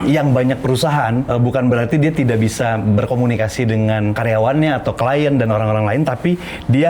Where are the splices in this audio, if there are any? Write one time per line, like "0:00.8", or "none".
0:01.3
0:04.2